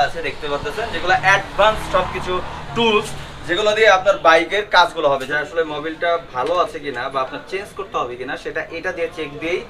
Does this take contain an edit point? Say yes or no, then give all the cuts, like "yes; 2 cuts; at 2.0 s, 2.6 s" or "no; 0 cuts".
yes; 1 cut; at 5.3 s